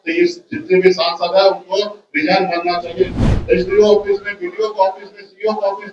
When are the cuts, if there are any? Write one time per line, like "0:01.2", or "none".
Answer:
0:03.3